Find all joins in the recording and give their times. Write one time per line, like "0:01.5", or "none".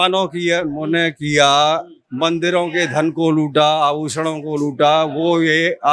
none